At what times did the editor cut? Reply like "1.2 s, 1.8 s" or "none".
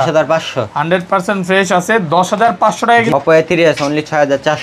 3.1 s

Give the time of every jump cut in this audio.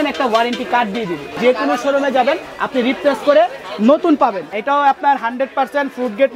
1.3 s, 4.5 s

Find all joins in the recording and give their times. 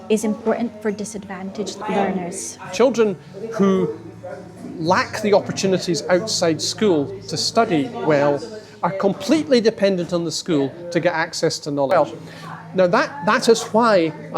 1.8 s, 2.7 s, 11.9 s

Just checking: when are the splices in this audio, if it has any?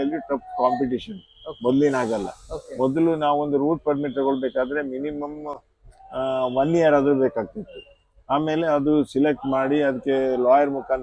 none

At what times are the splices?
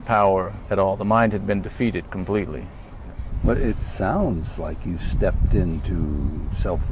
3.2 s

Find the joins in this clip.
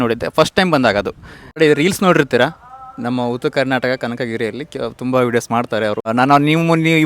1.6 s, 6.1 s

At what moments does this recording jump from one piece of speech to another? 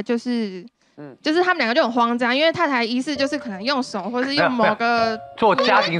none

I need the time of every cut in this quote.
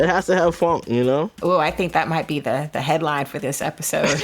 1.3 s

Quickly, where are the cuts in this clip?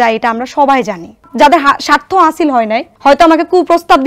1.2 s, 2.9 s

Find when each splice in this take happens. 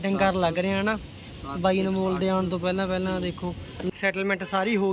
3.9 s

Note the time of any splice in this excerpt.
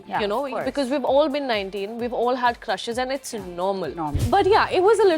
4.2 s

